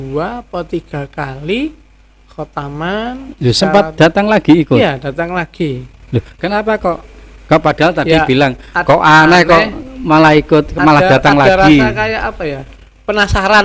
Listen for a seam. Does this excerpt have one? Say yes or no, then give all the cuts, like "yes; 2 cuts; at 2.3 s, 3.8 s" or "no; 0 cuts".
no; 0 cuts